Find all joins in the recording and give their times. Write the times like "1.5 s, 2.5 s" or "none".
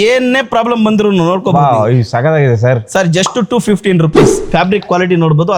4.3 s